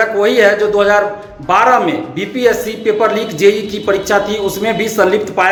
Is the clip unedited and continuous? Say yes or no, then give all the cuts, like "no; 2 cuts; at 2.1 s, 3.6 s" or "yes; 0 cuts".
yes; 0 cuts